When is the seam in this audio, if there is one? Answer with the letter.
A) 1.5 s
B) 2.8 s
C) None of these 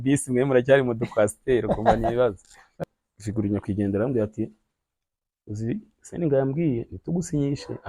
B